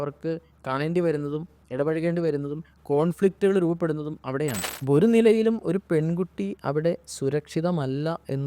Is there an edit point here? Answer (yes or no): yes